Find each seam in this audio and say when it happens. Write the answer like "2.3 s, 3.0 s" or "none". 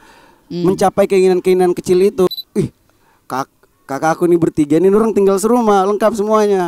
2.3 s